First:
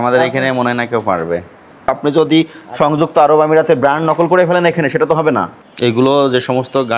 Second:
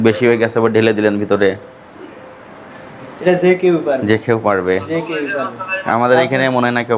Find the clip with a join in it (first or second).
first